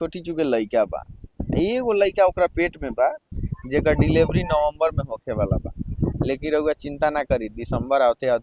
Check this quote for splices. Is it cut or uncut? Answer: uncut